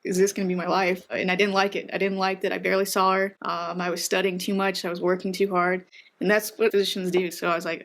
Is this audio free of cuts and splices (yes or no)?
no